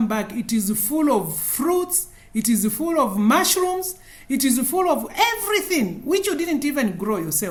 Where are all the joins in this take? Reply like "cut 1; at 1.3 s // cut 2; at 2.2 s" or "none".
none

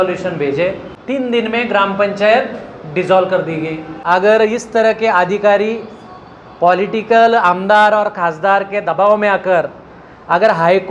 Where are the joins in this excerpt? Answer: cut 1; at 0.9 s // cut 2; at 3.9 s

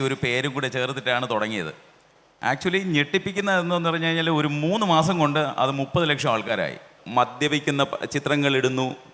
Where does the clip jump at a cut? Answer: cut 1; at 6.9 s

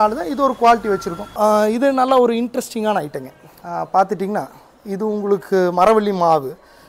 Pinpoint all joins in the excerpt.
cut 1; at 1.2 s

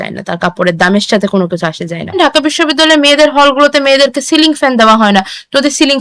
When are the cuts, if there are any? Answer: cut 1; at 2.1 s

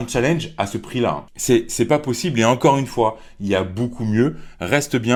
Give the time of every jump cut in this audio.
none

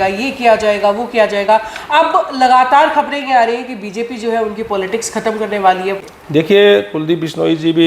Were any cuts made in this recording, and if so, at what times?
cut 1; at 6.0 s

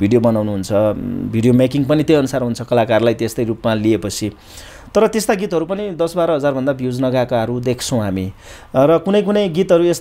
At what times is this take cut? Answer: none

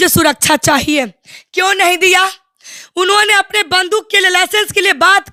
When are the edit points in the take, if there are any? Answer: none

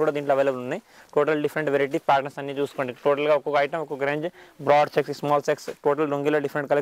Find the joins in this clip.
none

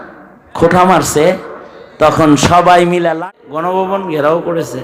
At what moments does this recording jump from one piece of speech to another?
cut 1; at 3.2 s

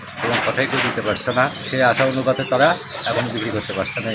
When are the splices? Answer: cut 1; at 2.9 s

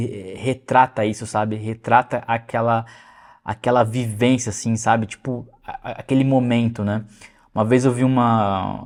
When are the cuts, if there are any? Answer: none

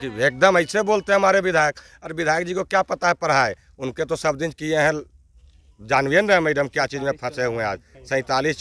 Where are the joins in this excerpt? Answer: none

